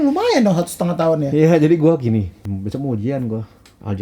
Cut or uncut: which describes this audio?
cut